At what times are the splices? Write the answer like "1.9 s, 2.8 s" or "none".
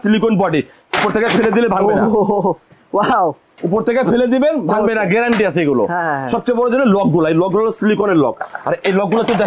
none